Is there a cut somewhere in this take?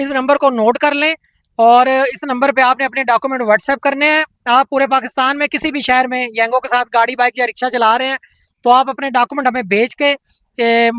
no; 0 cuts

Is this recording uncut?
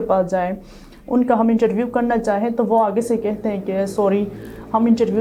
yes; 0 cuts

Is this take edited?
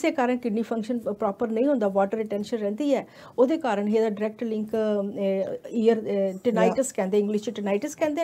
no; 0 cuts

